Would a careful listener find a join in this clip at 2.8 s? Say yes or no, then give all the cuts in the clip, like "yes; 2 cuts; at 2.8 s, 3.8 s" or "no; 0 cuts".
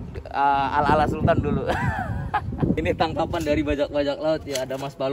yes; 1 cut; at 2.8 s